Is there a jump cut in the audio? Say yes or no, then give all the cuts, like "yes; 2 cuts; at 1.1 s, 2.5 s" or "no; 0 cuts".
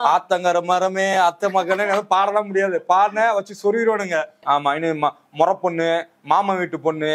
yes; 1 cut; at 4.3 s